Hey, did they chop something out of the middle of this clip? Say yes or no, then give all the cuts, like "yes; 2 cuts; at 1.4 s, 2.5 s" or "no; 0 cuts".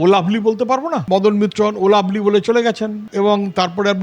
yes; 1 cut; at 1.0 s